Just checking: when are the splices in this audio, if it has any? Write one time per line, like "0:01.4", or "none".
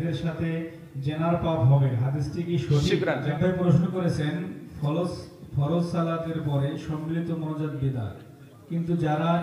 0:03.3